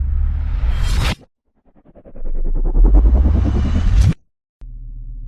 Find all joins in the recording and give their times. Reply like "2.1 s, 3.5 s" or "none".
4.4 s